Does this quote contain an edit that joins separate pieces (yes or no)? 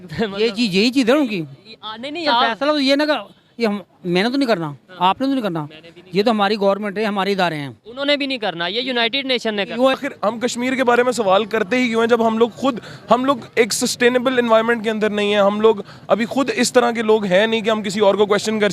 yes